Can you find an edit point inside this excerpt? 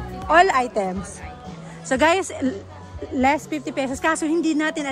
no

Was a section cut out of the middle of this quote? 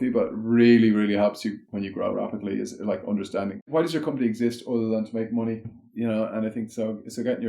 yes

